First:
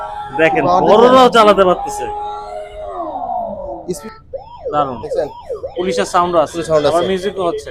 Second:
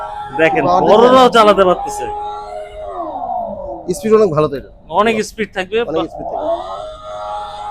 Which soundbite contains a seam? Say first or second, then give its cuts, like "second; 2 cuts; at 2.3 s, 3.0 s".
first; 1 cut; at 4.0 s